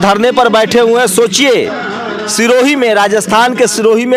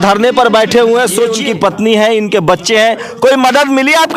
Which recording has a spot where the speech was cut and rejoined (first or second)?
second